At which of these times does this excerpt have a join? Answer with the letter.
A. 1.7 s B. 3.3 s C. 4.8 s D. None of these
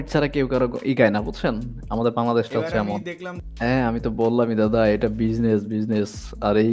D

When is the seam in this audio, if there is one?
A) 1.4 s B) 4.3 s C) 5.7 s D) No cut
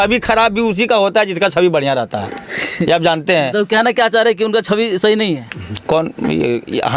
D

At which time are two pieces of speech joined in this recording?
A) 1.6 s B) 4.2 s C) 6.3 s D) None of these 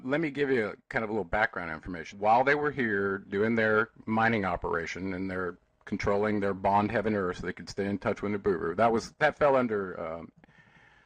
B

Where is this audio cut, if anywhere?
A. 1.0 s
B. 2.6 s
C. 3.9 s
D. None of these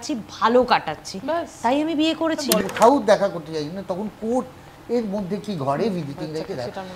B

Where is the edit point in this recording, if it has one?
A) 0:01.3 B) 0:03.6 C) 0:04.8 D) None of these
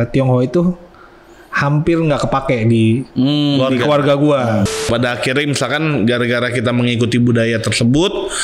C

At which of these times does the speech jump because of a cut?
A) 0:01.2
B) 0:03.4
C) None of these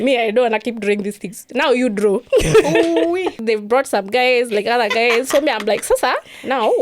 B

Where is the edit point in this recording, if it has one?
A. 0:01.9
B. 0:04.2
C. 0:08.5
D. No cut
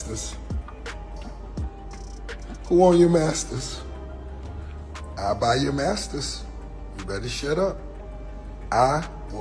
D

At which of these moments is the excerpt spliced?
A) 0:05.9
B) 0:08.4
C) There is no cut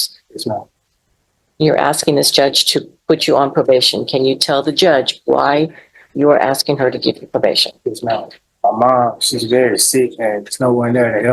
B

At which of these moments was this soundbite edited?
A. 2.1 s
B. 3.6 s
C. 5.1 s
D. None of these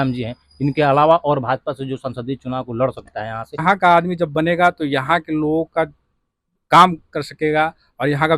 B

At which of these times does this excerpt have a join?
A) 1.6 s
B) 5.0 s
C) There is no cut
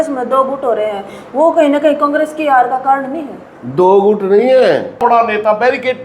B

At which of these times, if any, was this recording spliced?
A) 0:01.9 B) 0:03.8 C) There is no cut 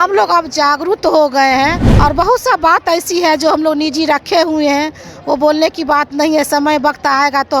A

